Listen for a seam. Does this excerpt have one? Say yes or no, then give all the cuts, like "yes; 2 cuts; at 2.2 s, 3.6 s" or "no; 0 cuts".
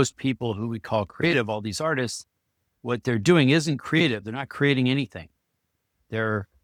no; 0 cuts